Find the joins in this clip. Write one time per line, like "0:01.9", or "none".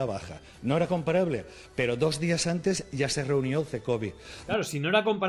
none